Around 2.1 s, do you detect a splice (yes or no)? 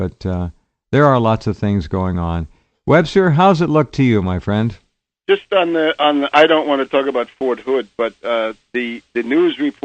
no